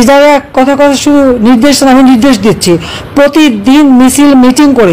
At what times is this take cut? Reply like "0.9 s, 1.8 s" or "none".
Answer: none